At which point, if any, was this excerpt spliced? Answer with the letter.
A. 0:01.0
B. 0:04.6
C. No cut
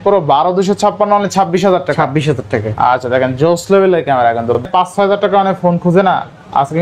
B